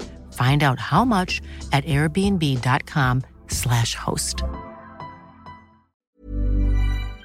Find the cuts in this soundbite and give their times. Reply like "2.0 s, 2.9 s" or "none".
5.9 s